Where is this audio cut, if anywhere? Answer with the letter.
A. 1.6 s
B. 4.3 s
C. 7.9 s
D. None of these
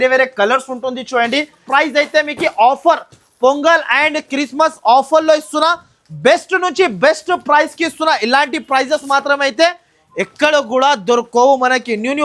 A